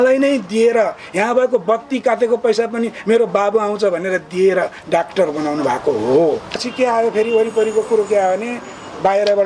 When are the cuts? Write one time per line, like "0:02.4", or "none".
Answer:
0:06.6